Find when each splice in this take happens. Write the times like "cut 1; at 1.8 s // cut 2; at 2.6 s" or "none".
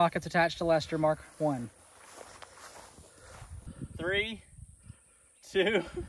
cut 1; at 3.7 s